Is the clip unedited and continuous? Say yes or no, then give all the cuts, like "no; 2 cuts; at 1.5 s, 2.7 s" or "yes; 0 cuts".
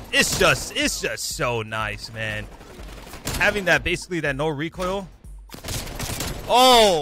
yes; 0 cuts